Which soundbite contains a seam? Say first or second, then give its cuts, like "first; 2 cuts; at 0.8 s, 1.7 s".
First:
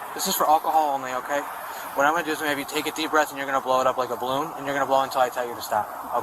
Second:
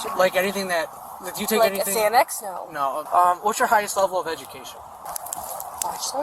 second; 2 cuts; at 3.0 s, 5.0 s